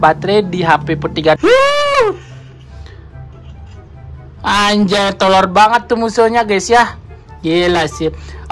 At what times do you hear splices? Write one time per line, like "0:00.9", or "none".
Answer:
0:01.4